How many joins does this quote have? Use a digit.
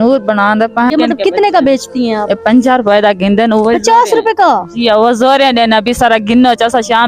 1